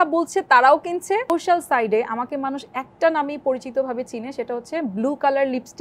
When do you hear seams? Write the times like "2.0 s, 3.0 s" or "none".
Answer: 1.3 s